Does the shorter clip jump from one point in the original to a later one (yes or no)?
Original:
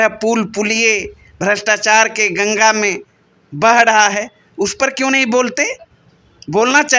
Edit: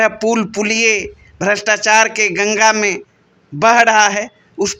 no